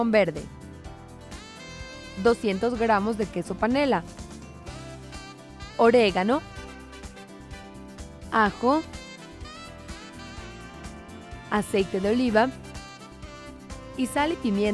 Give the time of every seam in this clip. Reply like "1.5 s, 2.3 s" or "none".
none

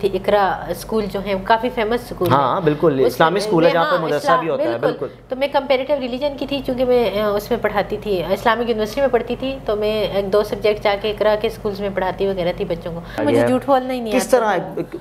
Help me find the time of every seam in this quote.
13.2 s

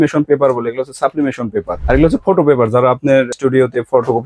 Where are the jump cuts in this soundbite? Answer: 1.7 s, 3.3 s

